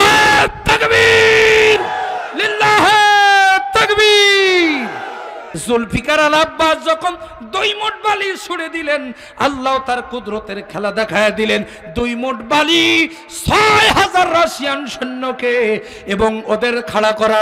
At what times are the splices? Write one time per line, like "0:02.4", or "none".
0:05.5